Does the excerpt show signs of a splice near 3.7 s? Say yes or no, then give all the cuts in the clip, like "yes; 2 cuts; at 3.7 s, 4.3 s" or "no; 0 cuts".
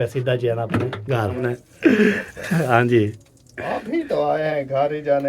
no; 1 cut; at 1.6 s